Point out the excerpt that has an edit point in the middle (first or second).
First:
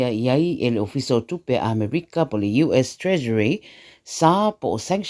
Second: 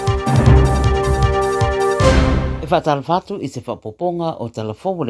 second